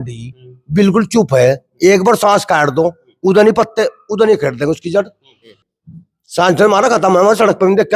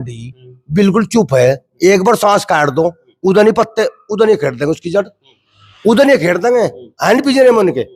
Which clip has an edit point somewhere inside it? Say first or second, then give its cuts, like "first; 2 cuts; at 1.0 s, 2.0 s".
first; 1 cut; at 5.6 s